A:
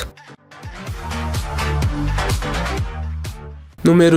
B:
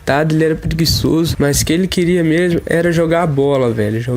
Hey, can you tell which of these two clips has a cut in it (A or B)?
B